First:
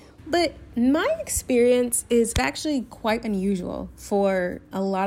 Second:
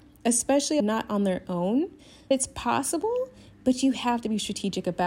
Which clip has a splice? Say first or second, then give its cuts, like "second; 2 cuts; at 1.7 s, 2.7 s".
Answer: second; 1 cut; at 2.3 s